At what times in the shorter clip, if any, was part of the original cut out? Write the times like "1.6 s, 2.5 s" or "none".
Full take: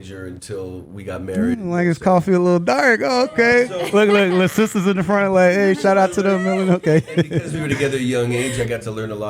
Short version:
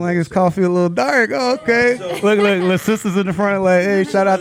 none